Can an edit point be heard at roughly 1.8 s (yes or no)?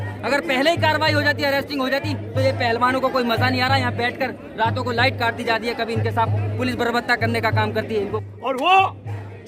no